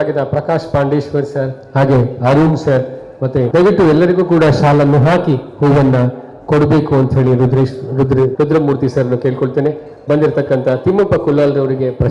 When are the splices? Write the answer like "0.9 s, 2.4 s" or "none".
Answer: 3.5 s, 8.3 s